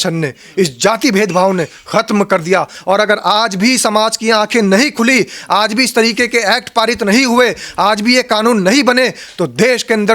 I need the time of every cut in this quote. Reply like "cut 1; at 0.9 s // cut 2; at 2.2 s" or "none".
cut 1; at 2.8 s

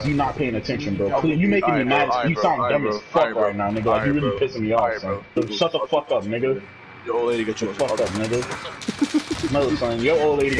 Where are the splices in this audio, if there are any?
cut 1; at 5.4 s

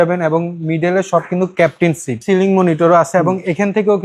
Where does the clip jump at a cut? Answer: cut 1; at 2.2 s

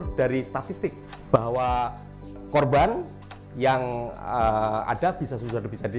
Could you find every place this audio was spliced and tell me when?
cut 1; at 1.1 s // cut 2; at 2.4 s

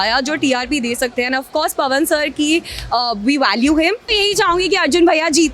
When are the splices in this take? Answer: cut 1; at 4.0 s

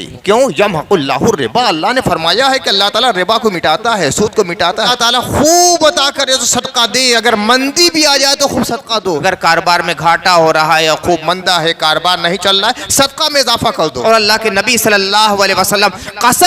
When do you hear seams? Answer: cut 1; at 4.9 s // cut 2; at 9.2 s // cut 3; at 14.0 s

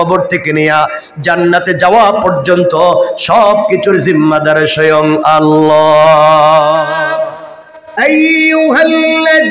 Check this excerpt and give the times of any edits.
cut 1; at 7.2 s

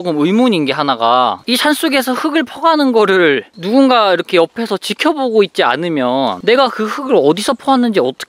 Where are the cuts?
none

